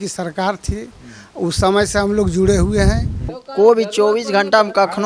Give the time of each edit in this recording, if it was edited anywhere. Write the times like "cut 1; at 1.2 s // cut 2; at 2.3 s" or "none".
cut 1; at 3.4 s